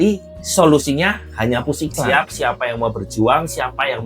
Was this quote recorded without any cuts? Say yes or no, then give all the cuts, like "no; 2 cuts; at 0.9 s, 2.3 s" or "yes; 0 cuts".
no; 1 cut; at 2.0 s